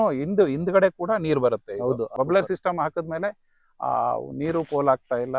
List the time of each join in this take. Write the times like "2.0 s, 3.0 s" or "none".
2.1 s